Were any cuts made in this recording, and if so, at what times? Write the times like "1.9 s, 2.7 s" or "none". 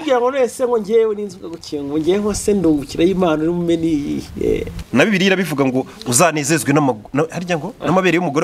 4.8 s